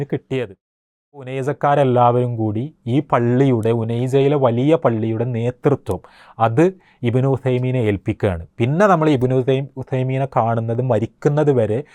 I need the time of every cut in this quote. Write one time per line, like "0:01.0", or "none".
0:01.2